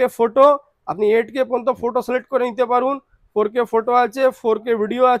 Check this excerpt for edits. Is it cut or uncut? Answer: uncut